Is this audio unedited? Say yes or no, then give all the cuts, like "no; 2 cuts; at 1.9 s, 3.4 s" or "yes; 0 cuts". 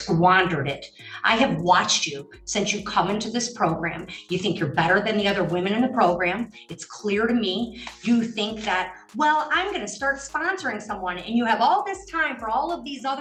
yes; 0 cuts